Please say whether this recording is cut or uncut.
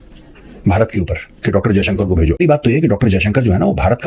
cut